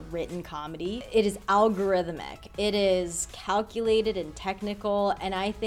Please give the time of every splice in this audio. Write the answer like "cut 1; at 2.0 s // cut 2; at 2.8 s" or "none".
cut 1; at 1.0 s

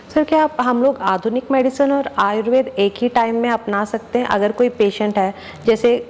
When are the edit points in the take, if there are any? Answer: none

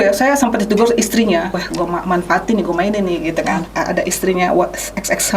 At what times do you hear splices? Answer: cut 1; at 1.5 s // cut 2; at 3.6 s

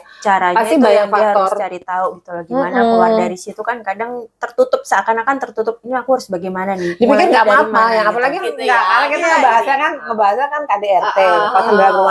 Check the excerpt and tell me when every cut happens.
cut 1; at 8.4 s

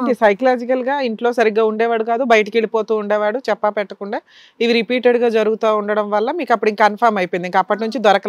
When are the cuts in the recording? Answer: none

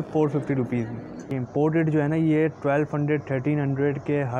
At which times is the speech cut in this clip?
cut 1; at 1.1 s

